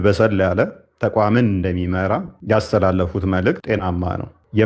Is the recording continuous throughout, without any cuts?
no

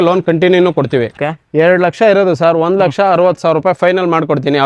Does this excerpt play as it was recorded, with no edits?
no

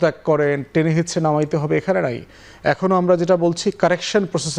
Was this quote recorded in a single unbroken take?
yes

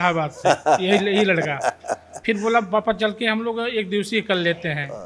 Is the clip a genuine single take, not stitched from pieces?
yes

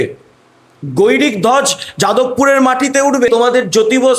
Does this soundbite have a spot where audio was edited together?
yes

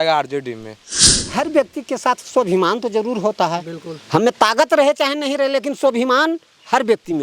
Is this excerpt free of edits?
no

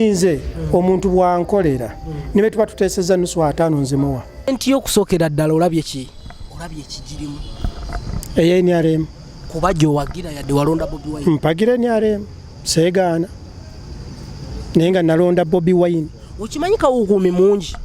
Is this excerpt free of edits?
no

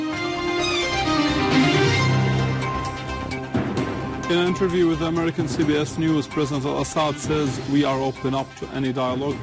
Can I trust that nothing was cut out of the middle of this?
yes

